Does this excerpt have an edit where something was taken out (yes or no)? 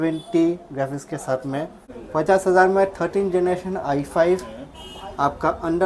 yes